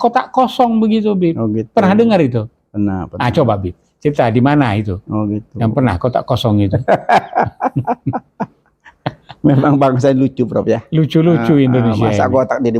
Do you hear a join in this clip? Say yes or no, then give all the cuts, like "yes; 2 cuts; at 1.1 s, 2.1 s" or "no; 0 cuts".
no; 0 cuts